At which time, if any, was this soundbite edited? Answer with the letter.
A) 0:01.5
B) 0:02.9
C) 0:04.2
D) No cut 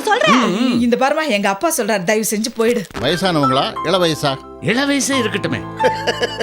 B